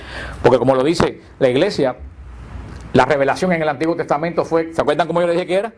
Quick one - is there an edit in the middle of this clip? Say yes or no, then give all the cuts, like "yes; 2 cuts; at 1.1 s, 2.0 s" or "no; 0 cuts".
yes; 1 cut; at 2.0 s